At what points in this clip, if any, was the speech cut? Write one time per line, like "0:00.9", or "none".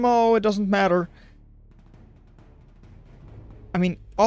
none